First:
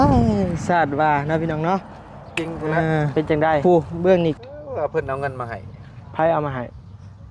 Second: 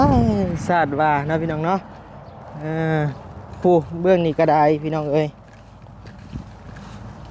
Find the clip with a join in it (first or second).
first